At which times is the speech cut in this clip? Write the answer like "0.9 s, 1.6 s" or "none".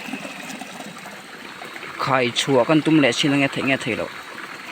1.2 s